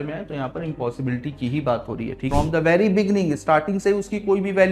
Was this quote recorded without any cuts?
no; 1 cut; at 2.2 s

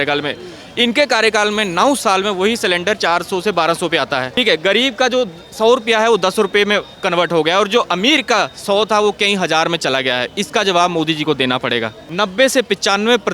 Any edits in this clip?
yes; 2 cuts; at 4.4 s, 12.0 s

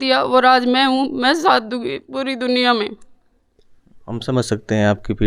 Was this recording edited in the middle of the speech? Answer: no; 0 cuts

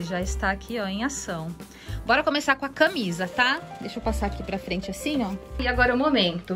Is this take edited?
yes; 1 cut; at 5.6 s

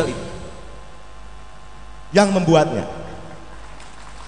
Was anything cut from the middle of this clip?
no; 0 cuts

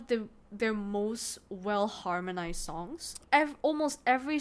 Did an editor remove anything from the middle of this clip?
yes; 1 cut; at 3.2 s

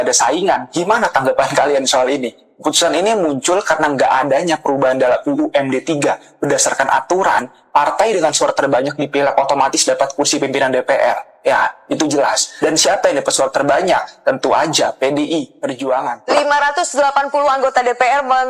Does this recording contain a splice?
yes; 1 cut; at 16.2 s

